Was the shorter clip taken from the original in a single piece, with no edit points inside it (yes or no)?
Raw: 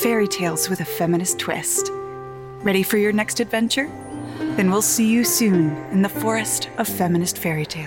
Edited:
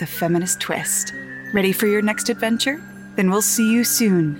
no